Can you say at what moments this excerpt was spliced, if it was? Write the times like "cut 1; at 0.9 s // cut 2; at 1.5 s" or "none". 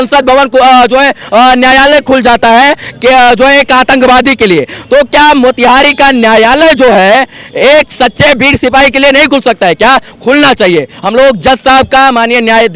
none